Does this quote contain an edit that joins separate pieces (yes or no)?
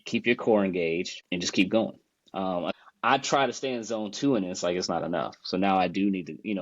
yes